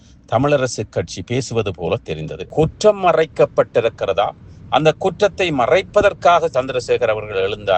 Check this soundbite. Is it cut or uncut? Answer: cut